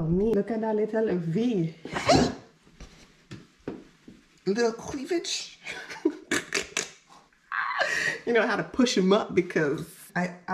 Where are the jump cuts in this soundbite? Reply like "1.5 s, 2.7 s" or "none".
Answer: none

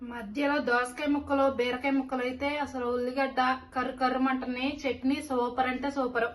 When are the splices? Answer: none

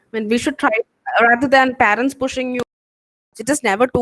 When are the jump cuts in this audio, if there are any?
2.9 s

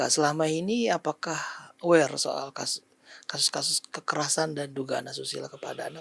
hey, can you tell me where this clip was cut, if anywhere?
none

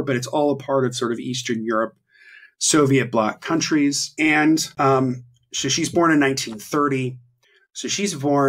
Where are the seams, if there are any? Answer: 4.1 s, 4.7 s

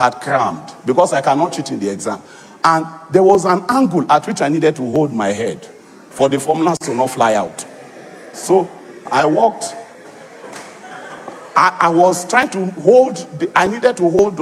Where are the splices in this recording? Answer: none

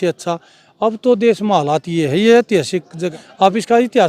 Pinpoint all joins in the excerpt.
3.0 s

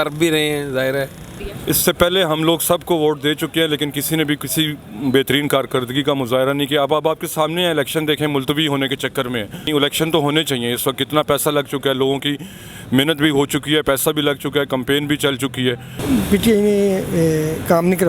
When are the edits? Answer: 1.4 s, 9.7 s, 15.9 s

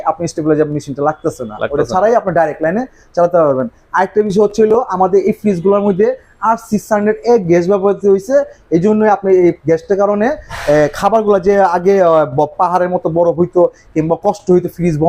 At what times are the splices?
none

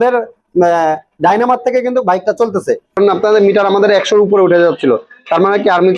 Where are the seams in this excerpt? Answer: 3.0 s

